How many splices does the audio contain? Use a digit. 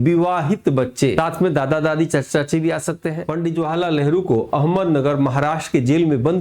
2